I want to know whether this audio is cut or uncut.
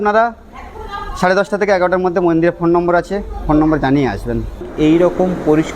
cut